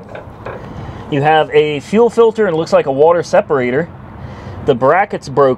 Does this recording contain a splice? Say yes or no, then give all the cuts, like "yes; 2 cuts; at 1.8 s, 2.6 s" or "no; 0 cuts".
no; 0 cuts